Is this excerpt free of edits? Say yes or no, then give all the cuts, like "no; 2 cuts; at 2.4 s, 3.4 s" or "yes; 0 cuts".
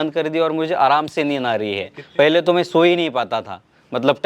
no; 1 cut; at 2.0 s